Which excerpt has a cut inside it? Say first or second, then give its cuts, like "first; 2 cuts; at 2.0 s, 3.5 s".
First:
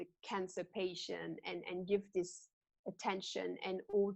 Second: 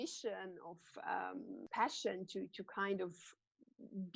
second; 1 cut; at 1.6 s